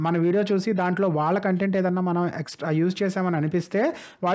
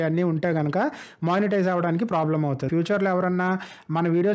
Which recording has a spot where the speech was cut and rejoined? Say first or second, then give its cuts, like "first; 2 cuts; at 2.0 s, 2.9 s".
second; 1 cut; at 2.7 s